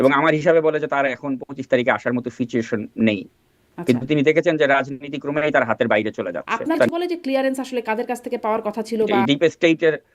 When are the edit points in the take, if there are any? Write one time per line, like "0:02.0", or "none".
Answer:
0:06.9
0:09.1